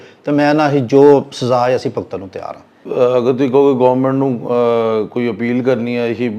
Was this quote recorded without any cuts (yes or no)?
no